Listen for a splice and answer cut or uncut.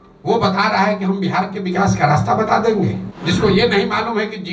cut